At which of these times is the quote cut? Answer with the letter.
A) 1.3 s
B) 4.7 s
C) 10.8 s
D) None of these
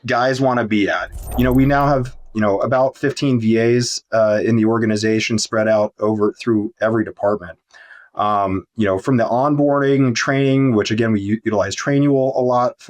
A